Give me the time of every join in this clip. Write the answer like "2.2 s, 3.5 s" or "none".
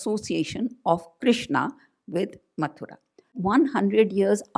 3.4 s